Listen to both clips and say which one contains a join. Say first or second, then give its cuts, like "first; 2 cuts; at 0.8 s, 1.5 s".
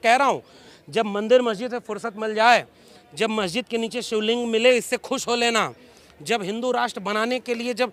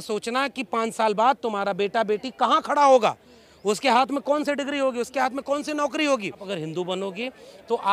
second; 1 cut; at 6.5 s